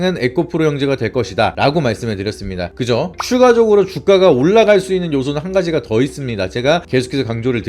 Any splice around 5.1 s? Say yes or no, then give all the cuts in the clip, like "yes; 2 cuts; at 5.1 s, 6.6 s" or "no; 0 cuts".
no; 1 cut; at 3.2 s